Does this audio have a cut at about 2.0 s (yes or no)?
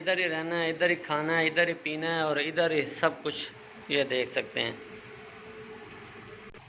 no